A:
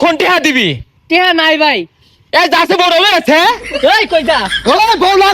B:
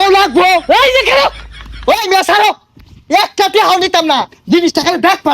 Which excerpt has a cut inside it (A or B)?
B